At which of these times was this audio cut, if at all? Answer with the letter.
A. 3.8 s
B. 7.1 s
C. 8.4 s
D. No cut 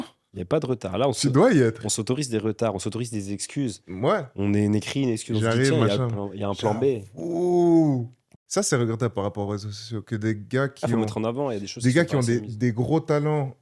C